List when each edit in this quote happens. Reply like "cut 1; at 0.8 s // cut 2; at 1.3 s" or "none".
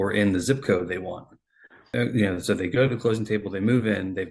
cut 1; at 1.8 s